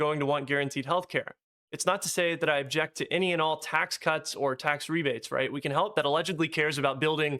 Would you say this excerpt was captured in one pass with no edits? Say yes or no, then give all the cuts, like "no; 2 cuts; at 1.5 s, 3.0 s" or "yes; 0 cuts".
no; 1 cut; at 5.9 s